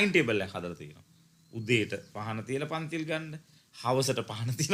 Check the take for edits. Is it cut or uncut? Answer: uncut